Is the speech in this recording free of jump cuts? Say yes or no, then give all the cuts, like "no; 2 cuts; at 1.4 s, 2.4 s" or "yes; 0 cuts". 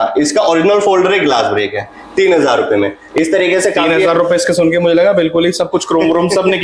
yes; 0 cuts